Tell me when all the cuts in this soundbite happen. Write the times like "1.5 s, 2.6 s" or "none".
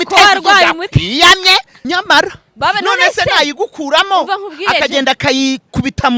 1.7 s